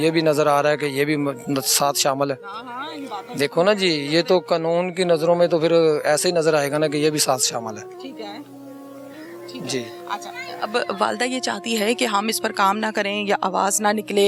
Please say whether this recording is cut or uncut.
uncut